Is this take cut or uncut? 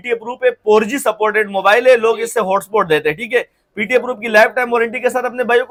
uncut